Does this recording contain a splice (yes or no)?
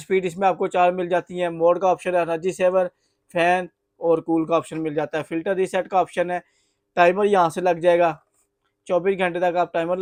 no